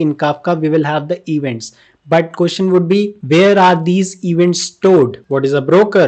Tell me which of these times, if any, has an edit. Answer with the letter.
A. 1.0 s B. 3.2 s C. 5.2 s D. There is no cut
C